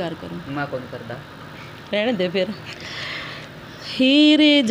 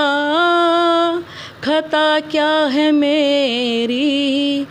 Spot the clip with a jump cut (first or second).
first